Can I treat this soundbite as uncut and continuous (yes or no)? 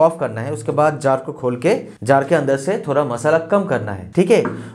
yes